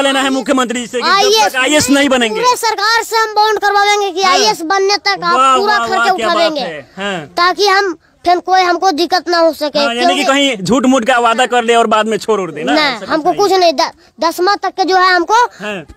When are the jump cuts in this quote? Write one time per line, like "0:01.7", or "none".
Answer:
none